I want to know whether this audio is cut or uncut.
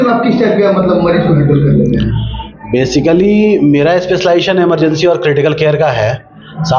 uncut